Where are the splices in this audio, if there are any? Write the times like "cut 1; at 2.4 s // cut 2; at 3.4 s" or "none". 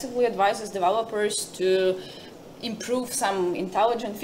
none